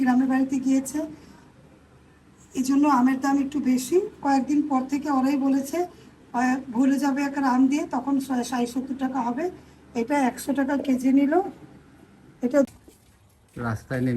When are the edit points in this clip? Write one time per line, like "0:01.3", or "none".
0:12.7